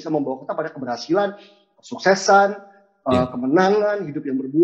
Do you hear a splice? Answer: no; 0 cuts

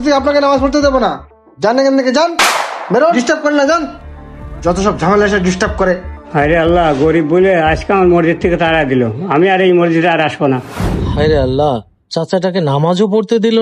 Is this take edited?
no; 0 cuts

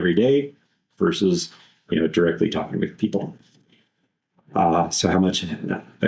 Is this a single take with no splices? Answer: yes; 0 cuts

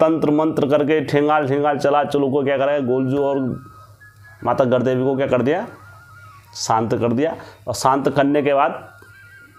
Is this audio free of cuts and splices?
yes; 0 cuts

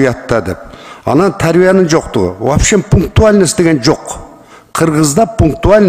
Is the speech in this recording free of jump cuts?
yes; 0 cuts

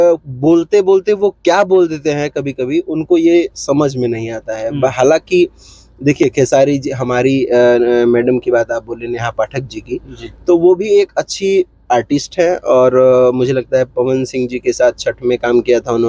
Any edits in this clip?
no; 0 cuts

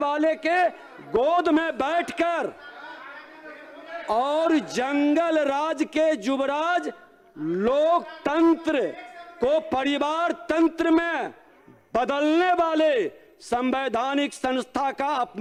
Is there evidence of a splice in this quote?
no; 0 cuts

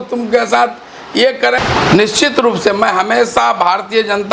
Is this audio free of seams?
no; 1 cut; at 1.6 s

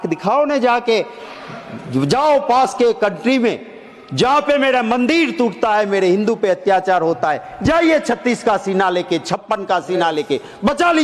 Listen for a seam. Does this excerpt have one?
no; 0 cuts

